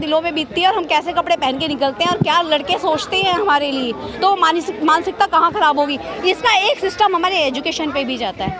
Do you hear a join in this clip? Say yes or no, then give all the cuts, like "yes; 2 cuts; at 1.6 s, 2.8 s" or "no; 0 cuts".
no; 0 cuts